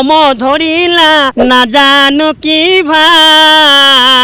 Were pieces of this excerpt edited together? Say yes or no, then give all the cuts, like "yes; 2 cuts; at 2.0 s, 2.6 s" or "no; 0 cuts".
yes; 1 cut; at 1.3 s